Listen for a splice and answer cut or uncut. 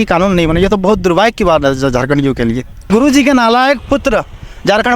cut